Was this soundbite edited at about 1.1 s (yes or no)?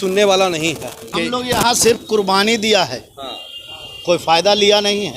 yes